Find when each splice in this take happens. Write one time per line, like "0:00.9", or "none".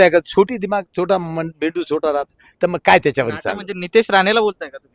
none